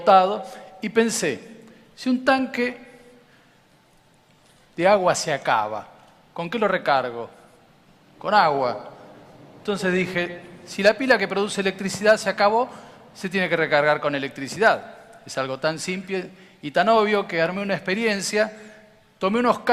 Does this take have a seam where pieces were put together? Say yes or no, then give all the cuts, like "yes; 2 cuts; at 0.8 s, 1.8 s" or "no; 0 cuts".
no; 0 cuts